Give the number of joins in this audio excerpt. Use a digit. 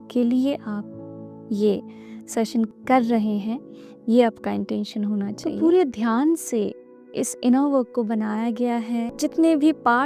3